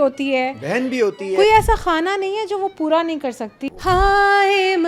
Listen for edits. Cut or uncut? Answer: cut